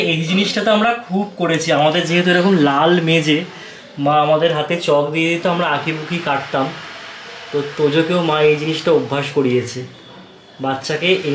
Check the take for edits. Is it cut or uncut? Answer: uncut